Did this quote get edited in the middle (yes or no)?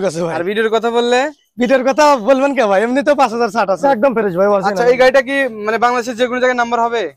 yes